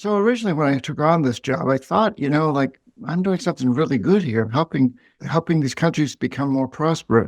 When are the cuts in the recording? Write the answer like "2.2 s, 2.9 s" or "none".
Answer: 5.1 s